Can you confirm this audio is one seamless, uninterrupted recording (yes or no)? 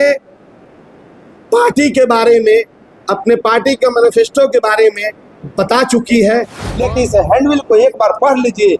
no